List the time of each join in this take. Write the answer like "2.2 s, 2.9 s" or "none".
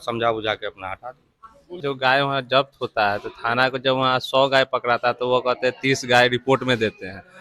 1.8 s